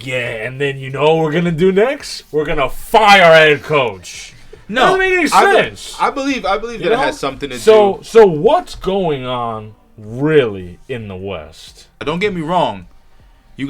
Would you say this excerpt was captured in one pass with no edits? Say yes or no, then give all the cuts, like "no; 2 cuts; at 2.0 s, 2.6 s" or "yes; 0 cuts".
no; 1 cut; at 12.0 s